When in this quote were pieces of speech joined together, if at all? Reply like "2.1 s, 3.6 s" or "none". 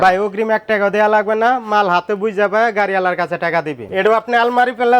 3.8 s